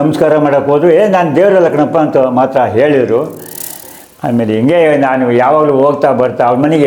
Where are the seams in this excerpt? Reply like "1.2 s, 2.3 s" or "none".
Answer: 3.8 s